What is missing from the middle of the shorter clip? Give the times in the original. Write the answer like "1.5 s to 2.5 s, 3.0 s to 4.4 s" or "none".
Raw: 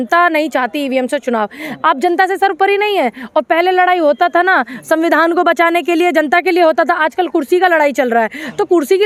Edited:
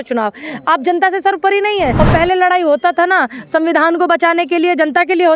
3.1 s to 3.3 s